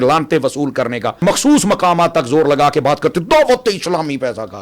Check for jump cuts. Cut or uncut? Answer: cut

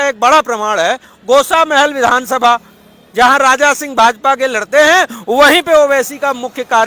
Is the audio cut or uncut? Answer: uncut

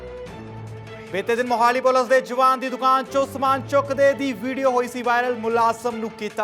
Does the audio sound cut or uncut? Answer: cut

